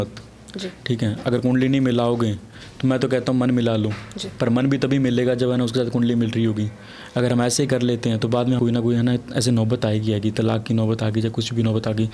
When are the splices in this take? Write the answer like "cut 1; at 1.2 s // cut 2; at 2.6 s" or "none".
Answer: cut 1; at 8.6 s